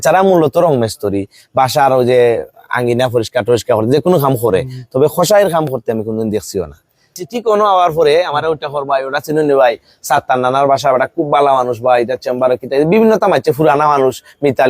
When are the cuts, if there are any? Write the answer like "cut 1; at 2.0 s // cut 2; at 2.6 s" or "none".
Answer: cut 1; at 7.2 s